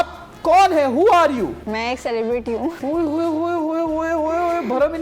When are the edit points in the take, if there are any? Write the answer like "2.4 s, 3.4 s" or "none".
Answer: 1.6 s, 2.8 s